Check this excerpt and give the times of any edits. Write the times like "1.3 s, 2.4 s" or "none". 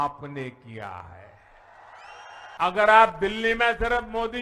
2.6 s

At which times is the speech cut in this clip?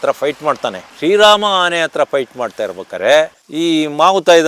3.4 s

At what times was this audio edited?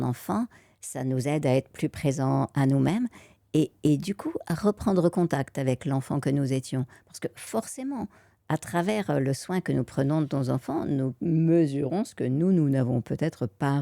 none

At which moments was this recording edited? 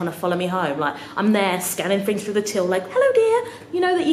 none

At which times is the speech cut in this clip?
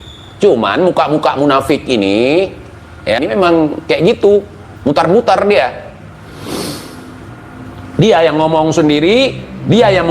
3.2 s

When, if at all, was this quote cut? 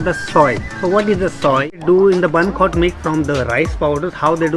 1.8 s

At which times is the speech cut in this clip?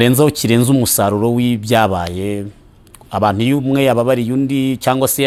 none

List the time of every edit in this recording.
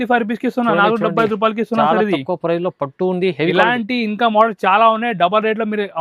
none

